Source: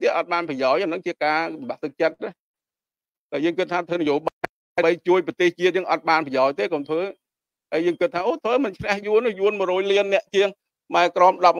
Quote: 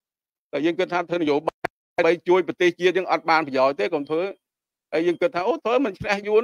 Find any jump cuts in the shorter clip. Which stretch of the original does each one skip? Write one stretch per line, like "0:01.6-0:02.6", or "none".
none